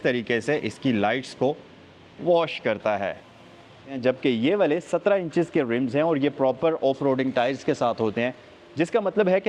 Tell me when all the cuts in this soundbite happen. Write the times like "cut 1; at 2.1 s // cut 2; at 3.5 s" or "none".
cut 1; at 4.0 s